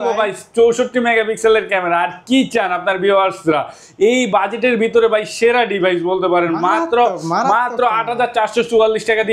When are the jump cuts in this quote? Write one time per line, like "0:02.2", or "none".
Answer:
none